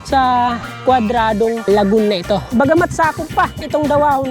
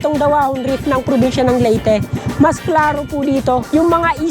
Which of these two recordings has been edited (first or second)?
first